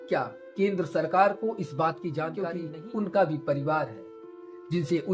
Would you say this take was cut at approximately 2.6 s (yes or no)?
yes